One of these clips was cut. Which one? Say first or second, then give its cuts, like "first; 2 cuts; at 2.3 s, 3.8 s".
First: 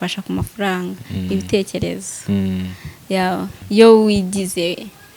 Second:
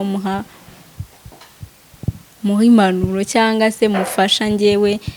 first; 1 cut; at 3.6 s